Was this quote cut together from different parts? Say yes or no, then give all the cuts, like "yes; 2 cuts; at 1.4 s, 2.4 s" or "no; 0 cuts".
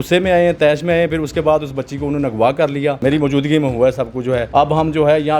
yes; 2 cuts; at 3.0 s, 4.5 s